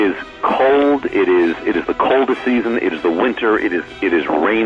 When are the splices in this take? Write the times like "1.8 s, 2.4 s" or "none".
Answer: none